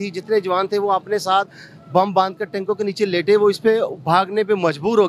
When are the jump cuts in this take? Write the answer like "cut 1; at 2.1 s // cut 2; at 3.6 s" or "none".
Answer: none